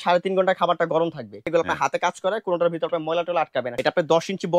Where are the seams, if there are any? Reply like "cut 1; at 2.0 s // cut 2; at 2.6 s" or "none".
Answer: cut 1; at 1.5 s // cut 2; at 3.7 s